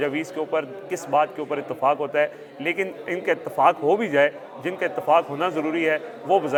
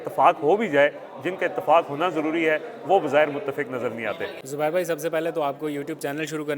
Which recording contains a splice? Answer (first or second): second